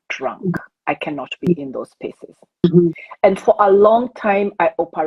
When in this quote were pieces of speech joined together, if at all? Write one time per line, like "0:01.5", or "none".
0:02.6